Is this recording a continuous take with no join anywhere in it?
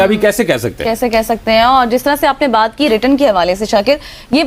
yes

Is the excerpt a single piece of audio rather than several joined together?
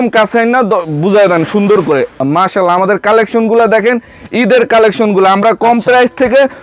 no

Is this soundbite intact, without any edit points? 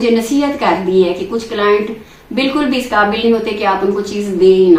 yes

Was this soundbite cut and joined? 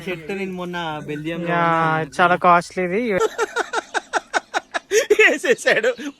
no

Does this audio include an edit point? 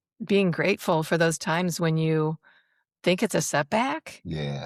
no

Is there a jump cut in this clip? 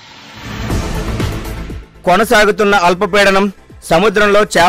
yes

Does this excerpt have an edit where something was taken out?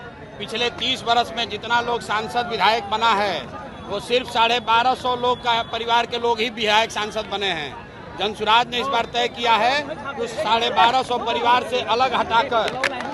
no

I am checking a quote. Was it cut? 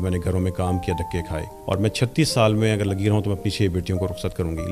yes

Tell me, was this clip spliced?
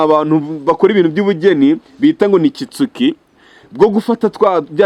no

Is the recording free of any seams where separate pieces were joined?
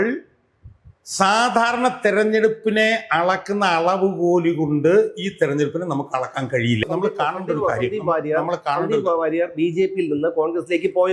no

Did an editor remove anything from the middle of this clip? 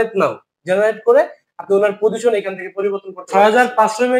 yes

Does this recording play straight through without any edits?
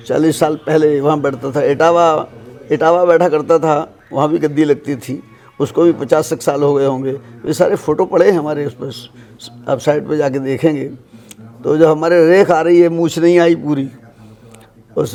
yes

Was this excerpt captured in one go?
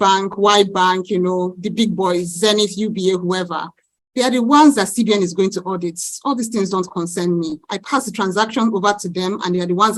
yes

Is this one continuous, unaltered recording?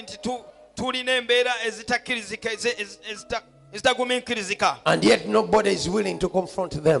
yes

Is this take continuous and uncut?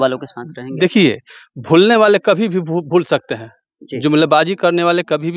yes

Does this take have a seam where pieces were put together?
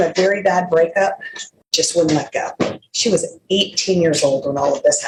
no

